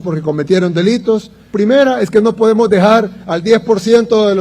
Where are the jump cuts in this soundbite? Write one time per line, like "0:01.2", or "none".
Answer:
0:01.5